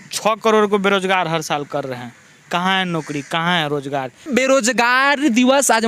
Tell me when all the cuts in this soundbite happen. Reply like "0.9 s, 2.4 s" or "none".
4.3 s